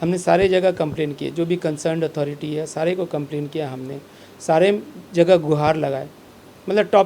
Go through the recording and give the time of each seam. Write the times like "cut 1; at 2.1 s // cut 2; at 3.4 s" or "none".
none